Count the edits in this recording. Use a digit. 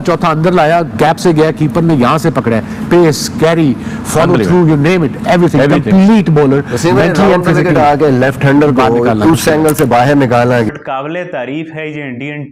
1